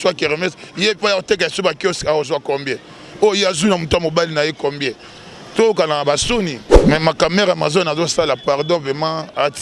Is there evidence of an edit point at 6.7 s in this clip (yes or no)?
yes